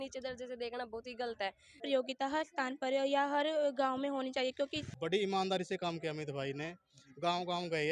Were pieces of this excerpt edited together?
yes; 2 cuts; at 1.8 s, 4.9 s

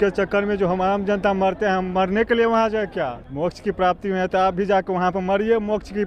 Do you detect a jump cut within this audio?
yes; 1 cut; at 3.2 s

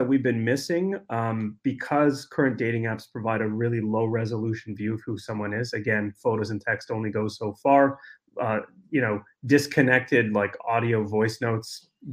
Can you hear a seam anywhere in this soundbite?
no; 0 cuts

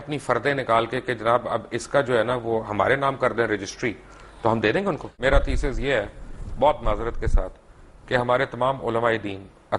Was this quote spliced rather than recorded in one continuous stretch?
yes; 1 cut; at 5.1 s

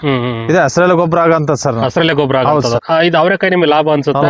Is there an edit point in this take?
yes; 1 cut; at 2.8 s

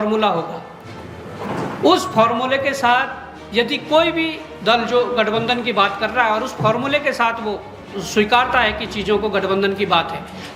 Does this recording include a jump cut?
no; 0 cuts

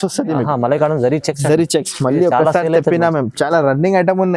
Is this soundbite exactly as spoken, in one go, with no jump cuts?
yes; 0 cuts

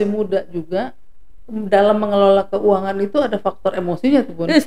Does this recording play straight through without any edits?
yes; 0 cuts

